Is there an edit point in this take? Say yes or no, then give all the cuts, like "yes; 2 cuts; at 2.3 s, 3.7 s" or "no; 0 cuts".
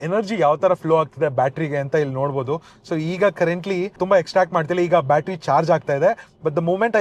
no; 0 cuts